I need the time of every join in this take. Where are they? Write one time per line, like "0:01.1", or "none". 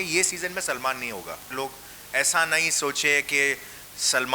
0:01.5